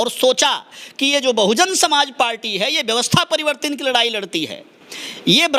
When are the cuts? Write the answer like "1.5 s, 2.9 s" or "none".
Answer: none